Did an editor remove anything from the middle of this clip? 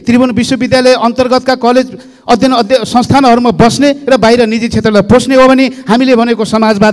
no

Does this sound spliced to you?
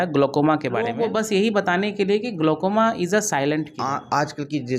yes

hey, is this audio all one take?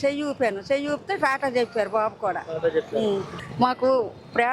no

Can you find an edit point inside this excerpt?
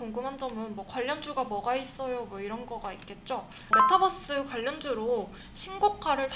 yes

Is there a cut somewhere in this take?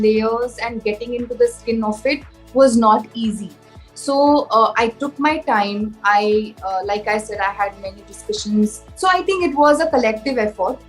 no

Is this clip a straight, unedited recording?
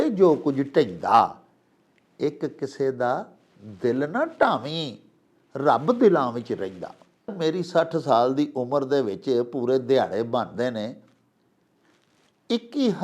no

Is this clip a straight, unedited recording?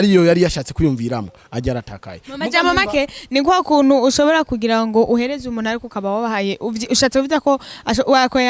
yes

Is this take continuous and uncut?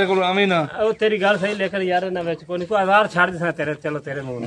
yes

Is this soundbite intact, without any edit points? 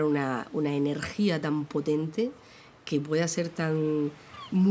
yes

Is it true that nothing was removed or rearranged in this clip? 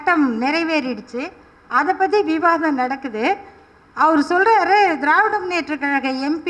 yes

